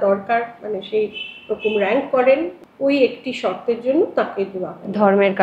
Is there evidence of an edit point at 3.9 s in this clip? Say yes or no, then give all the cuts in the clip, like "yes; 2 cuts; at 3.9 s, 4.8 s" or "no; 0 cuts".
no; 1 cut; at 2.6 s